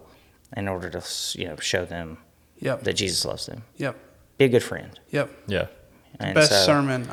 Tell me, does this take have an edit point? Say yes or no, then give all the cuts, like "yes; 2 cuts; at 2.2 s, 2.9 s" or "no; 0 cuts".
no; 0 cuts